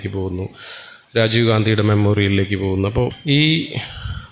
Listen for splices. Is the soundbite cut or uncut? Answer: cut